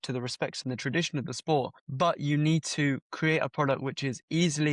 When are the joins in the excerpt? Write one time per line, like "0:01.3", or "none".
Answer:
0:01.8